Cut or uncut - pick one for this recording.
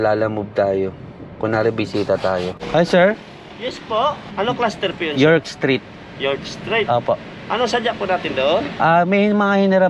cut